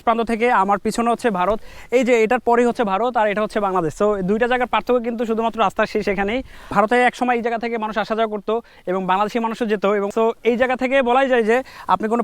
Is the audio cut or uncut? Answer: cut